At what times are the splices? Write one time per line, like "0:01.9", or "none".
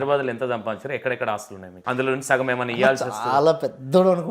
0:01.8

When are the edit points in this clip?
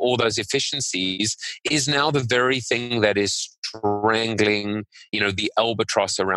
0:05.1

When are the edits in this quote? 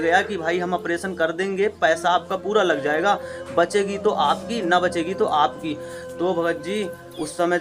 none

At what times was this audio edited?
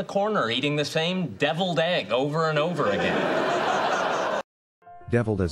none

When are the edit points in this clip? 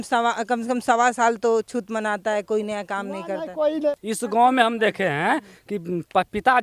0:03.9

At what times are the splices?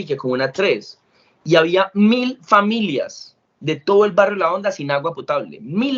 none

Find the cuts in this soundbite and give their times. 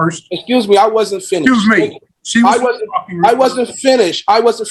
none

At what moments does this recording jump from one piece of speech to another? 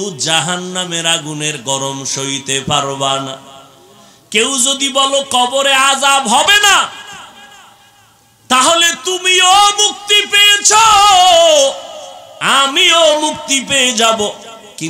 none

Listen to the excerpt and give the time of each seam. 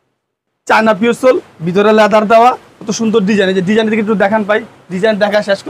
none

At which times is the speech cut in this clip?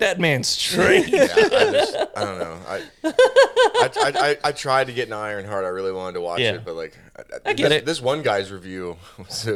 none

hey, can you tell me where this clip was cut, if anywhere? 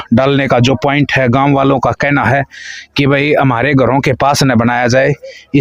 none

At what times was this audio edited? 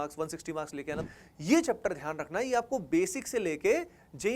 0:01.0

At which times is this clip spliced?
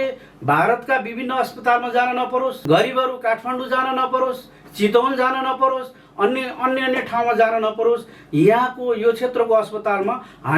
0:02.6

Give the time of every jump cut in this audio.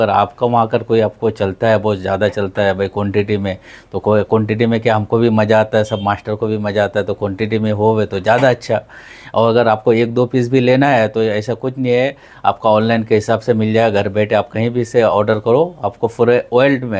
none

